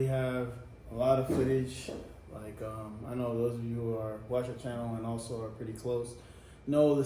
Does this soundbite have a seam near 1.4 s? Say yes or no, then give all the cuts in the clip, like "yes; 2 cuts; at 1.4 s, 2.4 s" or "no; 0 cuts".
no; 0 cuts